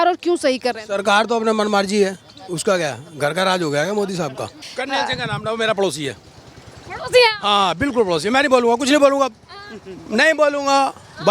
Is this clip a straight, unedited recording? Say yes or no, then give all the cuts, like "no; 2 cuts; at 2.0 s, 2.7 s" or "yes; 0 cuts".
no; 1 cut; at 4.7 s